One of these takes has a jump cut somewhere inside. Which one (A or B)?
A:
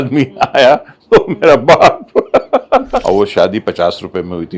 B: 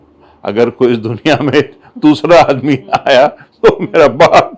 A